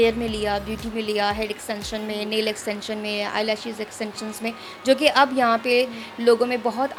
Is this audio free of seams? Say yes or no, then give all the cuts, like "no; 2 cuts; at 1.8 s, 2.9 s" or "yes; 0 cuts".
yes; 0 cuts